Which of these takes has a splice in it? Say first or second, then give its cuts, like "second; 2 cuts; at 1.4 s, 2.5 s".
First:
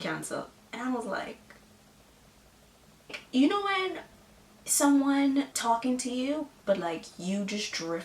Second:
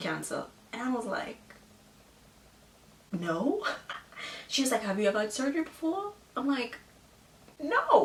first; 2 cuts; at 3.2 s, 5.5 s